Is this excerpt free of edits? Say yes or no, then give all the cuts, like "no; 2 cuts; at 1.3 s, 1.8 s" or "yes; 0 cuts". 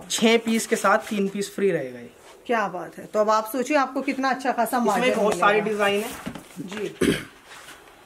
yes; 0 cuts